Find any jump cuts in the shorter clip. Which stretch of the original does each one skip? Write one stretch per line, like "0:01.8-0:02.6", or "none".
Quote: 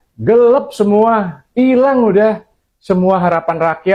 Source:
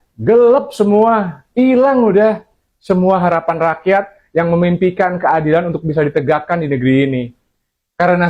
none